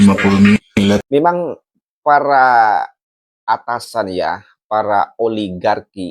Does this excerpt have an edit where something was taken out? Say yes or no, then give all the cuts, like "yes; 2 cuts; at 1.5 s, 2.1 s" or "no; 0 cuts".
yes; 1 cut; at 1.0 s